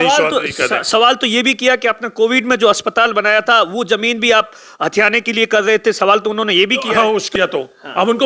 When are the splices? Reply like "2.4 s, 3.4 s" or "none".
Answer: 7.3 s

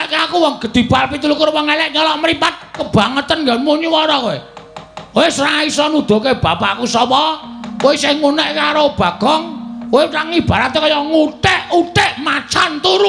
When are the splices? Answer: 2.9 s

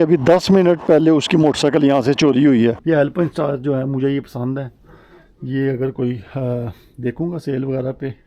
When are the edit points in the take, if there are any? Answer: 2.8 s

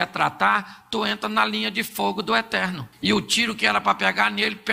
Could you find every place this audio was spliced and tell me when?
2.9 s

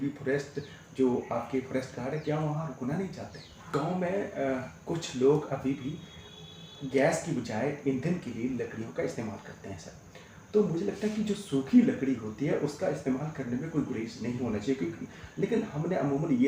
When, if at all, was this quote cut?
3.7 s

